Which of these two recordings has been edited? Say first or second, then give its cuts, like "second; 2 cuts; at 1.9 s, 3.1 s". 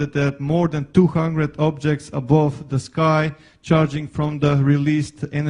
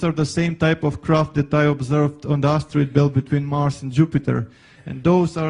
first; 1 cut; at 1.3 s